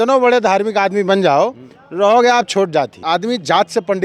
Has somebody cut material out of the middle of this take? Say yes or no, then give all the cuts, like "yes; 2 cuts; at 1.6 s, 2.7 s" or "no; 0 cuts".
yes; 1 cut; at 3.0 s